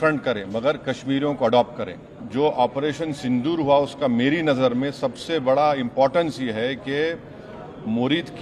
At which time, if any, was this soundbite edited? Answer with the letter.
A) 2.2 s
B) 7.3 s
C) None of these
A